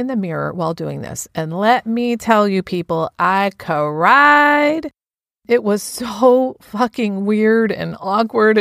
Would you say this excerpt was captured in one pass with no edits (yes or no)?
yes